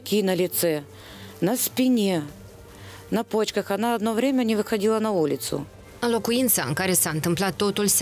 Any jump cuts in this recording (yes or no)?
yes